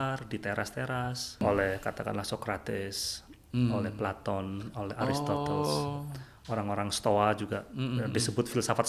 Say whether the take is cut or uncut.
cut